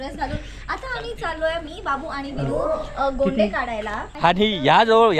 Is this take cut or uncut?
cut